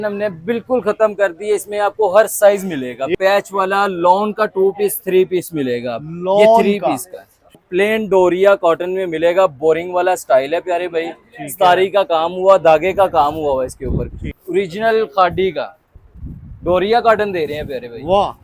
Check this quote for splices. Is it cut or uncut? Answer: cut